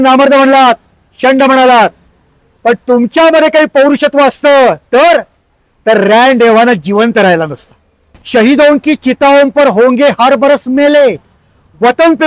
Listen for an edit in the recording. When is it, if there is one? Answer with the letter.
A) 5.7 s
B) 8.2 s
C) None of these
B